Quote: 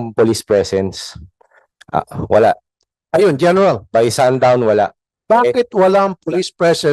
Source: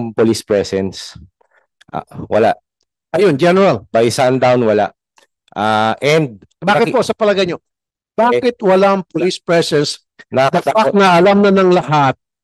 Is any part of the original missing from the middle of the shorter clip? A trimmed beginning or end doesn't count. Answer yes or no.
yes